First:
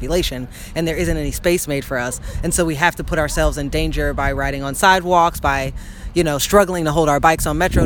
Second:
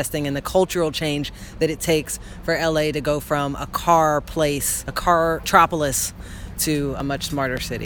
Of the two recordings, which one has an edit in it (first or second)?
second